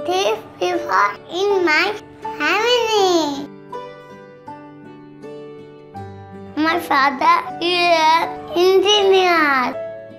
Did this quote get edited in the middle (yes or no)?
no